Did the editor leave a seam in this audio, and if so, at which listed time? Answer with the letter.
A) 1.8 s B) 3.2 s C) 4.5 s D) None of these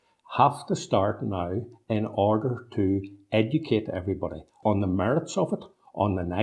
C